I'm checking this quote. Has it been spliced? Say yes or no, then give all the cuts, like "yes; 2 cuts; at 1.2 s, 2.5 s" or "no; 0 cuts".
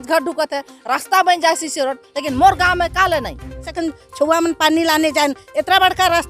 yes; 1 cut; at 3.7 s